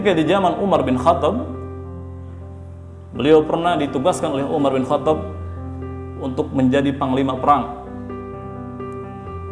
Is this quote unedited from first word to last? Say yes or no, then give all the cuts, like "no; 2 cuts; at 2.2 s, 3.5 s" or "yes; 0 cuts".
yes; 0 cuts